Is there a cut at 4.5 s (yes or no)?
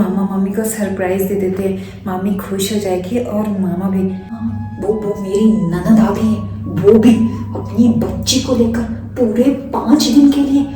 yes